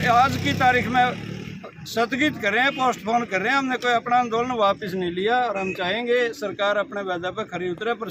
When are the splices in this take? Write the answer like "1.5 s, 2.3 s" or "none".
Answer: none